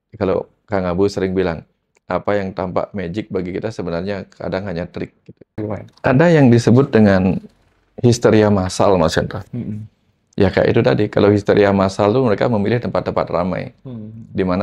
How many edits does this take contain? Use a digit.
1